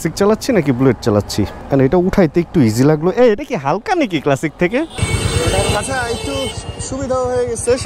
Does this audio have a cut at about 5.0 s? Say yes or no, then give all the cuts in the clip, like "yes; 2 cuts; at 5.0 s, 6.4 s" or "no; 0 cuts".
yes; 1 cut; at 5.0 s